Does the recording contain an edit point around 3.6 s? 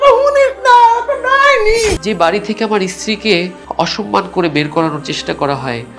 yes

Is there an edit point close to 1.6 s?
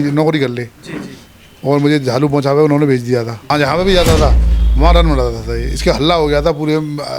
no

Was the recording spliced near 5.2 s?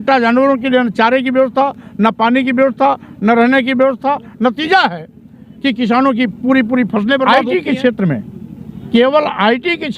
no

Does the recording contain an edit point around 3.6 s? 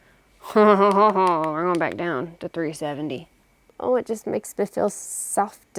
yes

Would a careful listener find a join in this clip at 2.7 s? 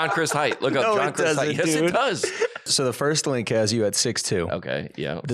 yes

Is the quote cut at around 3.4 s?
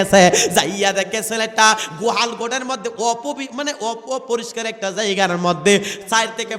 no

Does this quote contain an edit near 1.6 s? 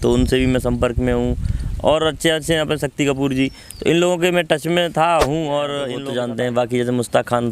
no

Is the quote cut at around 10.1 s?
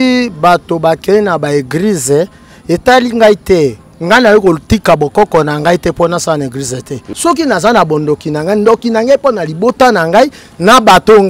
no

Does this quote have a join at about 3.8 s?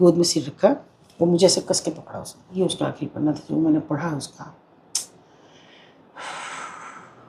no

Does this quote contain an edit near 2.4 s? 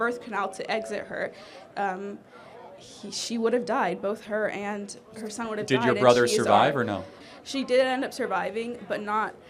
no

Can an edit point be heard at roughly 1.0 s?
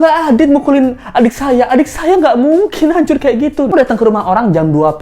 no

